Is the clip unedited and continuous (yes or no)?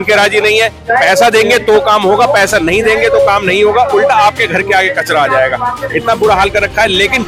yes